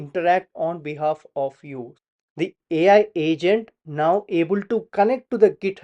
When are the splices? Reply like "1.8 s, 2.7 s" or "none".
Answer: 1.9 s